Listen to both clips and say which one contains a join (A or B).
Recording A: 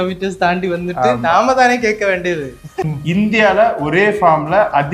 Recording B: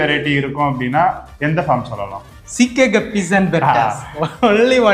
A